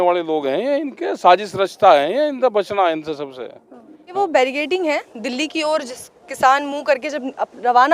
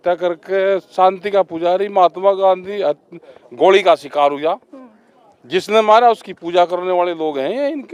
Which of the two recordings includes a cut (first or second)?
first